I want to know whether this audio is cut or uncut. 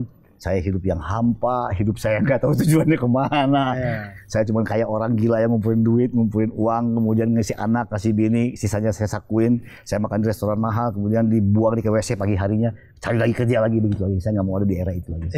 uncut